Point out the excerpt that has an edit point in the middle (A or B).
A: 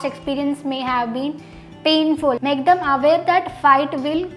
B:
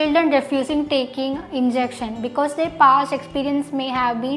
A